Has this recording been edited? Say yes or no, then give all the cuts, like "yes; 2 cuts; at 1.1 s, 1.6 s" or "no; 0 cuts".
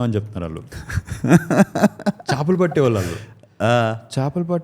no; 0 cuts